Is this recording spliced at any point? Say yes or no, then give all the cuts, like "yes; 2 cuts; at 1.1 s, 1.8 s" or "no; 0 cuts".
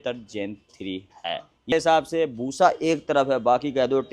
yes; 1 cut; at 1.7 s